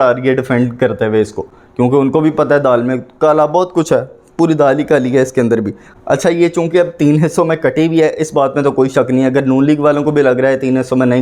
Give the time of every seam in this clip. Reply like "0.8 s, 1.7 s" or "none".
none